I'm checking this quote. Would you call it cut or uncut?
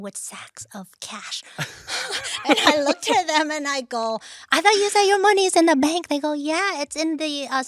uncut